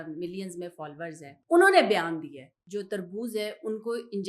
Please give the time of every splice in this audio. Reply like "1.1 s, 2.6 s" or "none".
1.3 s, 2.6 s